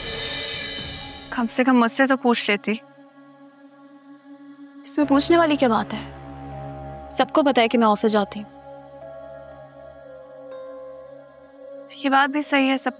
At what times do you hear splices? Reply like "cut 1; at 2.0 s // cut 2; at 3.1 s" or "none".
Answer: cut 1; at 1.1 s